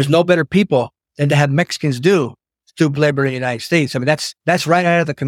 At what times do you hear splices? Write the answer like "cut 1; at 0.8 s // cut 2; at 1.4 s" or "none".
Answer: cut 1; at 4.3 s